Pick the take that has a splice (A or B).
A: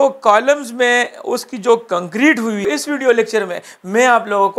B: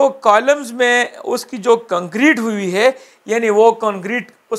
A